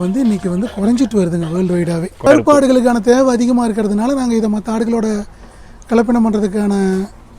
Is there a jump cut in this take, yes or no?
yes